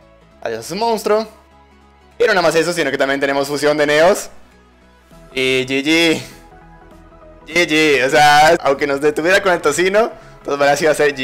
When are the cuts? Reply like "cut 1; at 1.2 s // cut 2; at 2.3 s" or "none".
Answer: cut 1; at 8.6 s